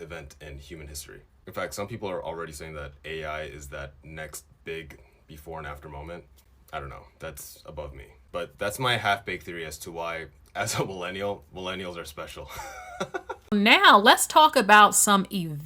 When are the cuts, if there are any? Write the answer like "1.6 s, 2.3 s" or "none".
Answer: 13.5 s